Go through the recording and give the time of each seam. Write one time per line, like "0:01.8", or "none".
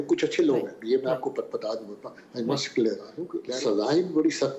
0:03.4